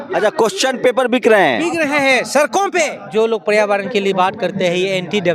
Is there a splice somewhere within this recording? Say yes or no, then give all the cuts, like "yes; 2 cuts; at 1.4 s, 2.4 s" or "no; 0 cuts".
yes; 1 cut; at 3.0 s